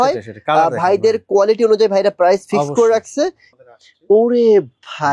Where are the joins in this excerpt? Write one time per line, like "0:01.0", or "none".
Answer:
0:03.4